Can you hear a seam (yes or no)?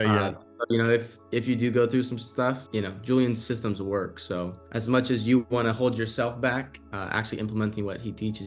yes